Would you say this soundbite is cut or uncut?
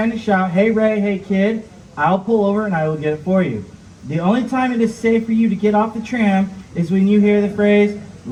uncut